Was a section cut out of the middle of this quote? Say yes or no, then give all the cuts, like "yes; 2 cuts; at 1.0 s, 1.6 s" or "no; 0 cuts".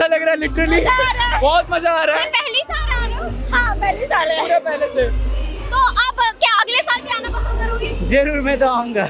no; 0 cuts